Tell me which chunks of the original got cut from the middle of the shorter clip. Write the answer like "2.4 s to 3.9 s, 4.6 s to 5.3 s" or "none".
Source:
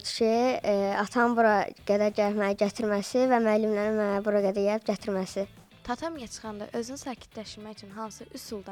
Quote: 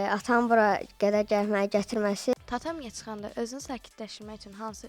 3.2 s to 5.7 s